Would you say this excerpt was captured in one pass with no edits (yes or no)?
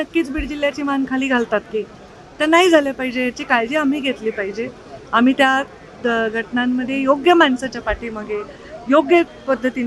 yes